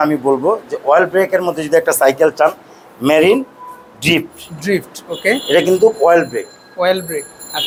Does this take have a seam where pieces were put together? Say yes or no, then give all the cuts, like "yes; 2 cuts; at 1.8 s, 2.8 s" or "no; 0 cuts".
no; 0 cuts